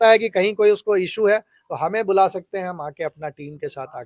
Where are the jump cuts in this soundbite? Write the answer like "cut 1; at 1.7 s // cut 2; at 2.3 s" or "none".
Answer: none